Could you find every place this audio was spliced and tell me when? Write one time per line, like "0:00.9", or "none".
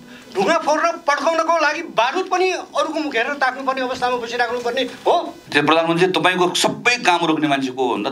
0:05.4